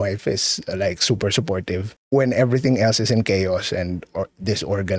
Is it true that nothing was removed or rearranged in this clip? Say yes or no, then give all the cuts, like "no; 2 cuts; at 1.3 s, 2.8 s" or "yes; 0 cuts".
yes; 0 cuts